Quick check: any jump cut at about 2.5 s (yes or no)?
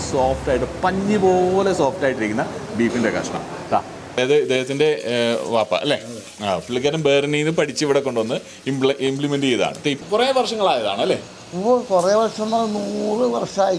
no